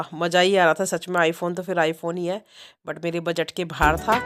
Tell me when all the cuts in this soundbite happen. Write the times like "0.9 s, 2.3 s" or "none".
none